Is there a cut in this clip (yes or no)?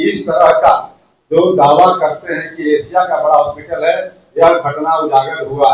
no